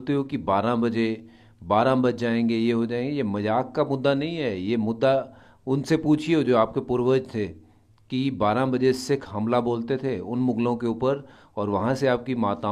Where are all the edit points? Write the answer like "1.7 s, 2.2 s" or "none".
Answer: none